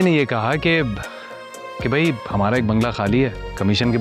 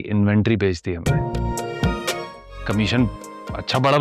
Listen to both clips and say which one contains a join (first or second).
second